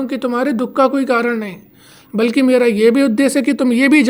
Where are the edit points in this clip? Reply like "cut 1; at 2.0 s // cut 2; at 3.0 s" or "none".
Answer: none